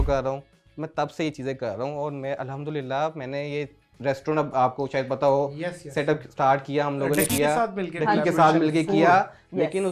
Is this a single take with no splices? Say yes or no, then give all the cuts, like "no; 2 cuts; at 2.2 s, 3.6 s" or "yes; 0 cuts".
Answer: yes; 0 cuts